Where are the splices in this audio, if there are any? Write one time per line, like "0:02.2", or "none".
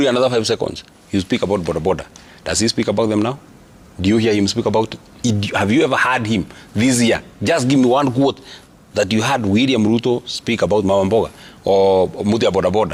none